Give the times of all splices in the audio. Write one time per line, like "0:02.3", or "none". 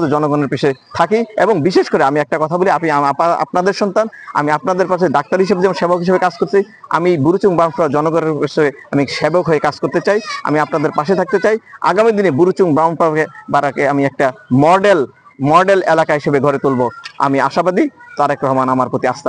none

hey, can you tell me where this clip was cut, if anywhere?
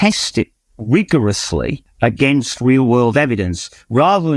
0:01.8

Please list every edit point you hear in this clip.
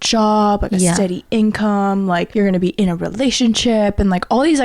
0:02.3

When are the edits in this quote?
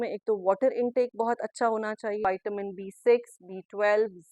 0:02.2

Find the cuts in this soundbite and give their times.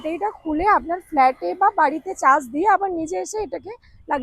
none

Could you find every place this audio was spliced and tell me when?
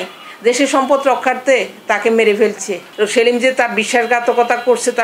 0:02.8

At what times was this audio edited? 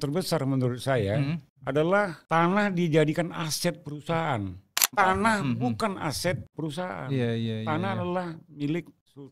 0:01.5
0:02.2
0:04.9
0:06.5

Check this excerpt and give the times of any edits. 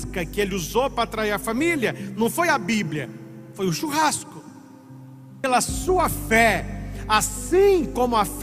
0:05.4

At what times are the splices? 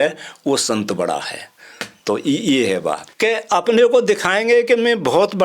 0:03.1

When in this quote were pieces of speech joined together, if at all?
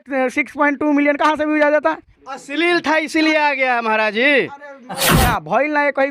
0:05.2

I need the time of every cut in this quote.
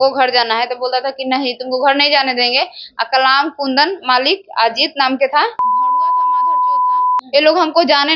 0:07.2

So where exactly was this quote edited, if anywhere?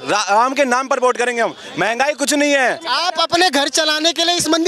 0:02.9

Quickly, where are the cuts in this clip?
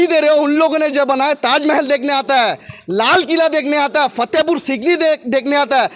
none

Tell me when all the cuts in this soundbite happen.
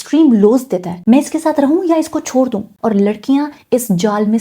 0:01.0
0:02.7

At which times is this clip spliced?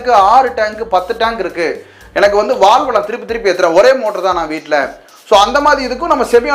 none

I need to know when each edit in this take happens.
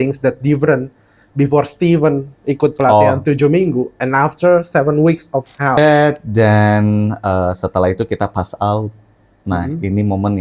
0:05.8

